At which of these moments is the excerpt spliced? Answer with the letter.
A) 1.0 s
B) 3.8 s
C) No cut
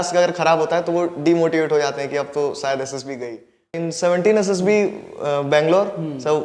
B